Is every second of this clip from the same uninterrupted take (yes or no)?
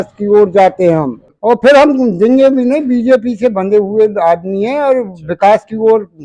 no